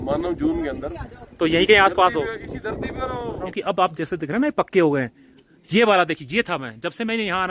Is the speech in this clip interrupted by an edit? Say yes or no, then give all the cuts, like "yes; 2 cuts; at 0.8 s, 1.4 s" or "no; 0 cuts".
yes; 1 cut; at 3.5 s